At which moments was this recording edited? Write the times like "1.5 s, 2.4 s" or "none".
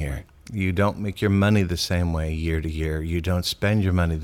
none